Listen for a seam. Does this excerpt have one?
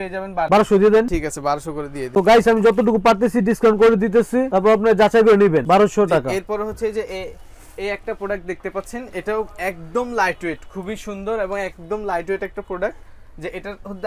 no; 0 cuts

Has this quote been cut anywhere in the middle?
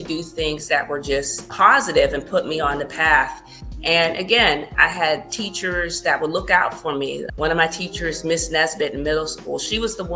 yes; 3 cuts; at 1.5 s, 4.7 s, 7.3 s

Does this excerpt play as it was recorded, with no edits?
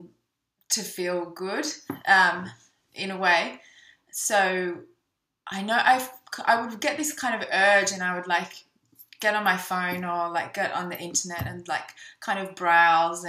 no; 1 cut; at 11.3 s

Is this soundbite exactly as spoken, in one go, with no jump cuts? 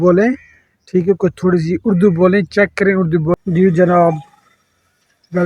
no; 1 cut; at 3.4 s

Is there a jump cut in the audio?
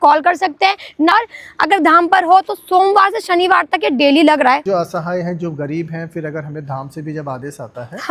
yes; 2 cuts; at 1.1 s, 4.6 s

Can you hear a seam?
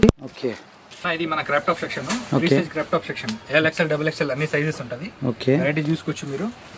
yes; 1 cut; at 1.1 s

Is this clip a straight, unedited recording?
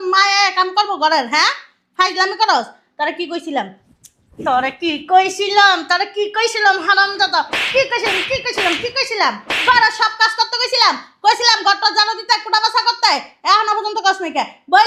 yes; 0 cuts

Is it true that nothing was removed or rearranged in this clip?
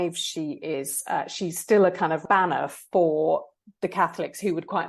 no; 1 cut; at 2.2 s

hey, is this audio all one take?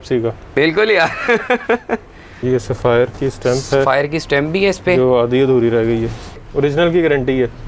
no; 2 cuts; at 2.4 s, 6.5 s

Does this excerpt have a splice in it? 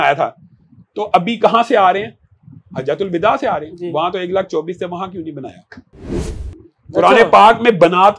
yes; 1 cut; at 6.2 s

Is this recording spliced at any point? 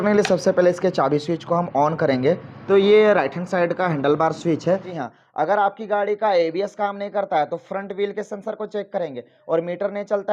yes; 2 cuts; at 2.5 s, 4.9 s

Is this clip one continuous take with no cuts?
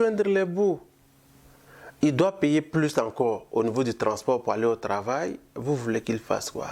yes; 0 cuts

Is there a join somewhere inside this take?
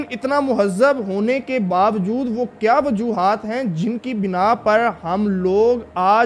no; 0 cuts

